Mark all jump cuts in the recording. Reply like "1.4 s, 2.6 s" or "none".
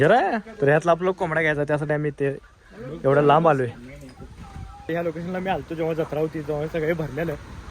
4.9 s